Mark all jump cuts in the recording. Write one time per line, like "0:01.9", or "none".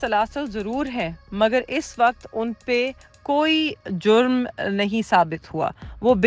none